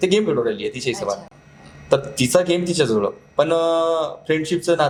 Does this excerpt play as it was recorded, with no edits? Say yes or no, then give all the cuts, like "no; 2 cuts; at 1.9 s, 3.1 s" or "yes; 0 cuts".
yes; 0 cuts